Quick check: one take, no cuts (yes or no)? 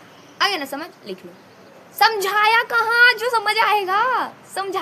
yes